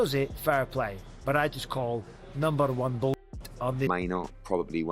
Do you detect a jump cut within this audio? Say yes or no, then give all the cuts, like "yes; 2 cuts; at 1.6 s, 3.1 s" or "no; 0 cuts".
yes; 1 cut; at 3.7 s